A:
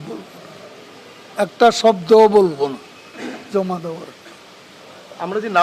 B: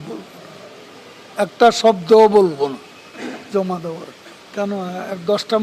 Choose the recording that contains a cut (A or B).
B